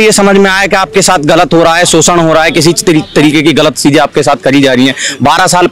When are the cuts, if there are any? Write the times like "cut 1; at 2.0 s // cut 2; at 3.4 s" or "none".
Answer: none